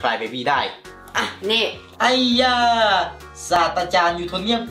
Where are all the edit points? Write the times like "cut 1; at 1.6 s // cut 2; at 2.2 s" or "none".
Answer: cut 1; at 1.8 s